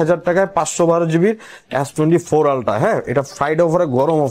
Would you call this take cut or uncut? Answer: uncut